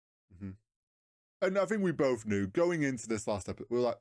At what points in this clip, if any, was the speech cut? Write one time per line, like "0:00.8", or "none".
0:01.3